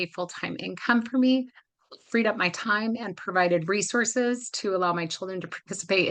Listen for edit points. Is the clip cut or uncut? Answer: uncut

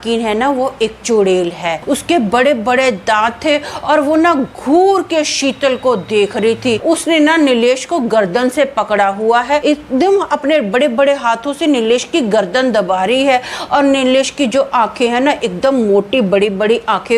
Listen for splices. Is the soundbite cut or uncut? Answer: cut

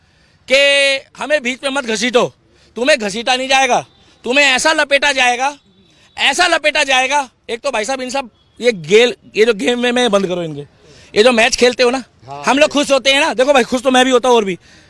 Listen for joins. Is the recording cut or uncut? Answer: uncut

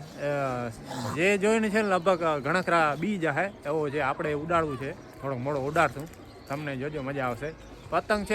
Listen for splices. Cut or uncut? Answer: uncut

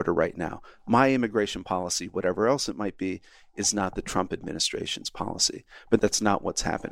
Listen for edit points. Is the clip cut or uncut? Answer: cut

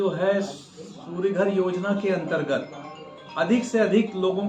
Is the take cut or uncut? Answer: uncut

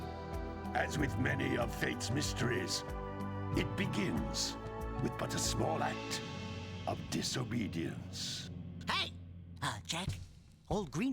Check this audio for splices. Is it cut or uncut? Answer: cut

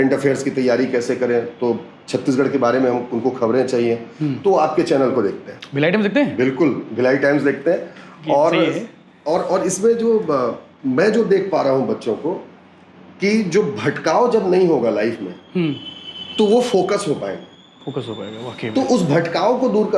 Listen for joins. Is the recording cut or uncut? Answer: uncut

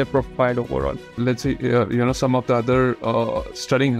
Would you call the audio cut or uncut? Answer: cut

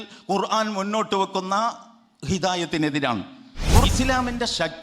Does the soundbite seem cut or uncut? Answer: cut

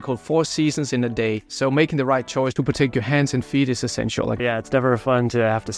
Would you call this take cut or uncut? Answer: cut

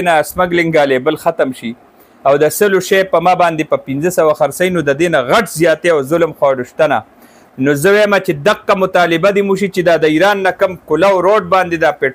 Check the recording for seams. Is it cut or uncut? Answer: uncut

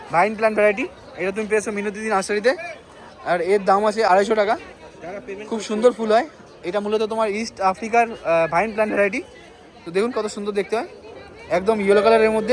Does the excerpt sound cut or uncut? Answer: uncut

